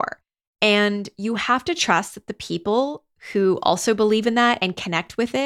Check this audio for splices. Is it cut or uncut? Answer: uncut